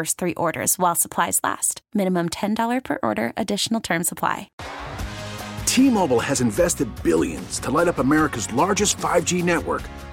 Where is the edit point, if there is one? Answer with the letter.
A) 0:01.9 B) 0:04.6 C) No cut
B